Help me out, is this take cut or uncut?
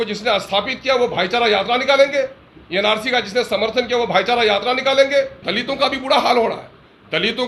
cut